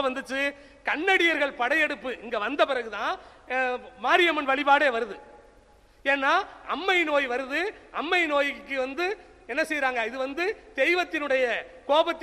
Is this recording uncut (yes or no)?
yes